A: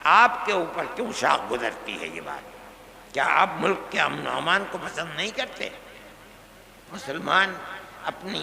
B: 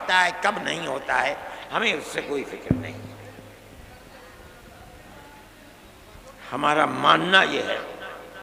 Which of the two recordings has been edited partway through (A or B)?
A